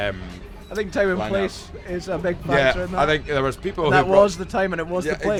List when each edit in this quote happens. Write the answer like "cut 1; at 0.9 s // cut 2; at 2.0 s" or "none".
none